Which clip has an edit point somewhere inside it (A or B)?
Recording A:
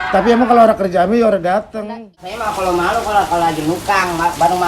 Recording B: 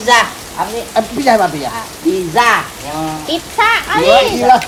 A